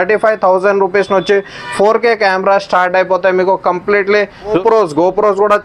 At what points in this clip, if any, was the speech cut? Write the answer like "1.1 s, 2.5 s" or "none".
4.6 s